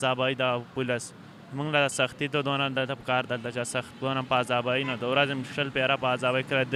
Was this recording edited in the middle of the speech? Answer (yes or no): no